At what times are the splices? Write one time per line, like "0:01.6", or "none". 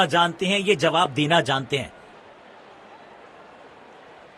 none